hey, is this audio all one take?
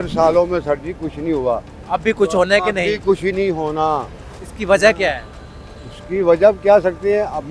yes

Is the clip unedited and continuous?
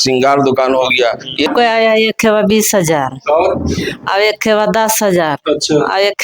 no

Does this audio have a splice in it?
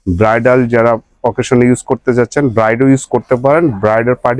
no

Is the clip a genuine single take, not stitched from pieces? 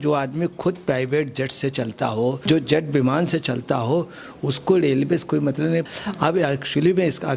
no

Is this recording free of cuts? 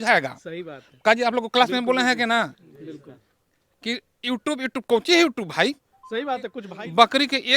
no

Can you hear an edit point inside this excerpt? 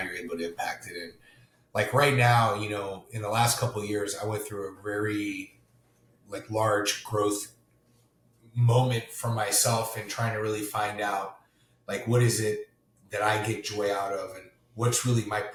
no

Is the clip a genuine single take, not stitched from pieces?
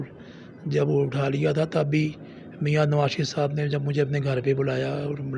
yes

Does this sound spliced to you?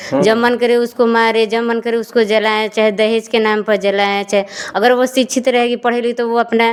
no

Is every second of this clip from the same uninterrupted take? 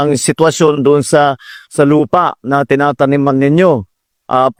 yes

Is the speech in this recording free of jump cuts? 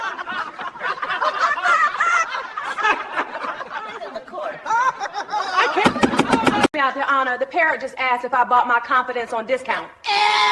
no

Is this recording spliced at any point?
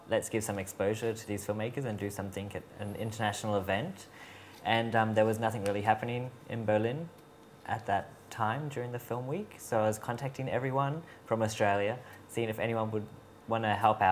yes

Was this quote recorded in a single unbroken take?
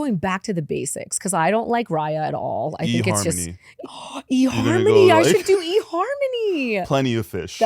no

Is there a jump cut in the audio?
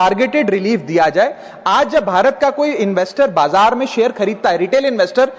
no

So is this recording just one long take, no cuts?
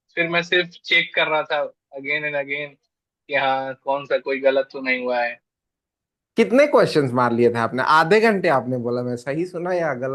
yes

